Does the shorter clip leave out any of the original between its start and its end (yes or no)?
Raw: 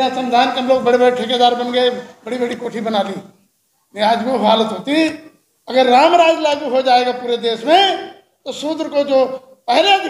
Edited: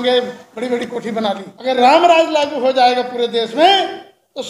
yes